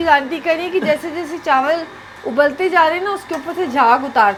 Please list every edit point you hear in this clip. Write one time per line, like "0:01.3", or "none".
none